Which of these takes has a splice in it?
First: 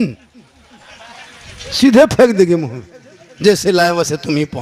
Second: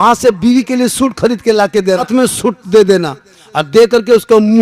second; 1 cut; at 2.1 s

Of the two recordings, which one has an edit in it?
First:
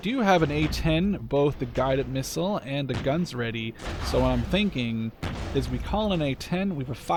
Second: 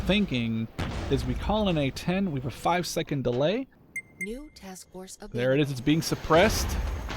second; 1 cut; at 3.8 s

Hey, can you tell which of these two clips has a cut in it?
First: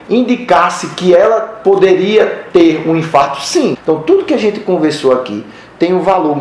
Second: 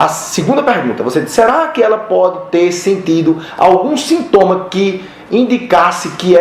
first; 1 cut; at 3.8 s

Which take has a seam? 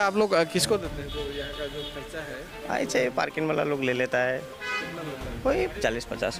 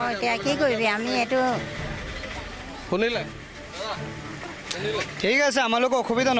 second; 1 cut; at 2.1 s

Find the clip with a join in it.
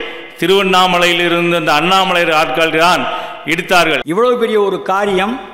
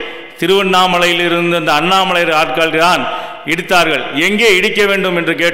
first; 1 cut; at 4.0 s

